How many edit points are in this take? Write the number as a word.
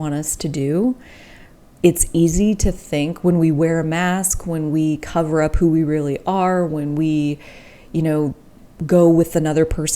zero